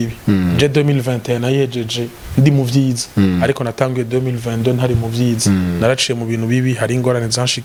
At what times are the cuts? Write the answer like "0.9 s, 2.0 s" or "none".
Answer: none